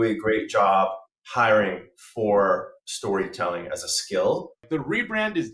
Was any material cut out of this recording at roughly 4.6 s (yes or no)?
yes